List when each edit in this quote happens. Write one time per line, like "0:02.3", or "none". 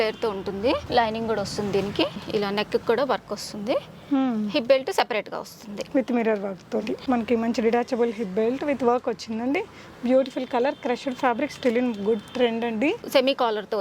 0:00.8
0:02.2
0:07.0
0:13.0